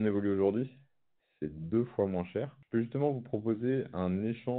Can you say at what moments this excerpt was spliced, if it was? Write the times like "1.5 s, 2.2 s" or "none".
2.6 s

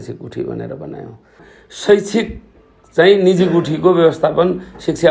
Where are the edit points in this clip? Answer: 1.4 s

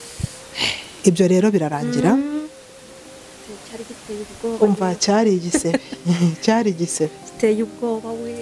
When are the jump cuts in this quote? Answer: none

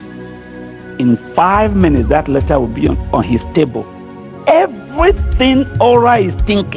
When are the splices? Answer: 1.0 s

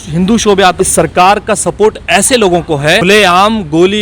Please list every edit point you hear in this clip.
0.8 s, 3.0 s

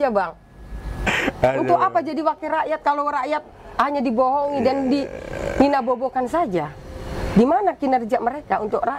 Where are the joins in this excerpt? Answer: 1.1 s

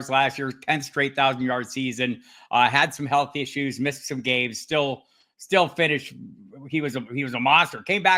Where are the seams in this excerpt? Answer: none

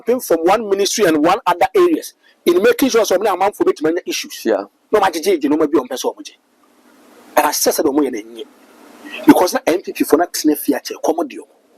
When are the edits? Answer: none

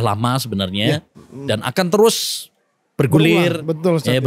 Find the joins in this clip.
none

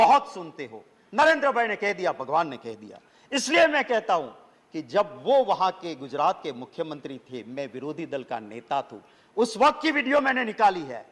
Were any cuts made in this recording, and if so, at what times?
none

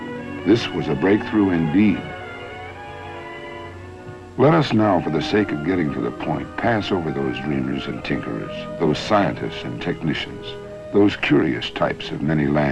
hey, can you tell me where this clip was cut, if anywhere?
6.1 s

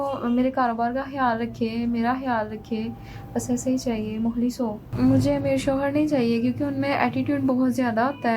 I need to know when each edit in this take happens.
4.9 s

